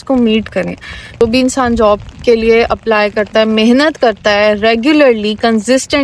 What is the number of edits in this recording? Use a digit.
1